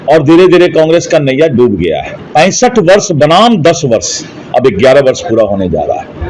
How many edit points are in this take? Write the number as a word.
one